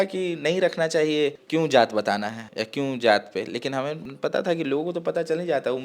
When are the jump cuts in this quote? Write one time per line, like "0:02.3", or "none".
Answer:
0:01.4
0:04.1